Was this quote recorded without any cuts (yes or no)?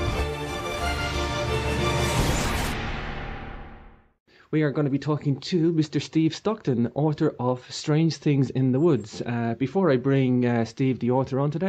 yes